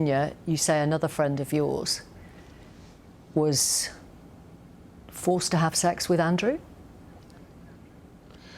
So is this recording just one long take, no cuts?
yes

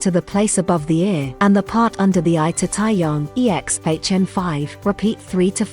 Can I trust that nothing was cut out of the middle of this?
no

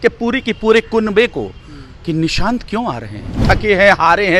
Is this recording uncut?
no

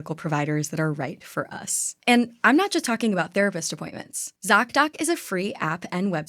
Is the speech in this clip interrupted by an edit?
no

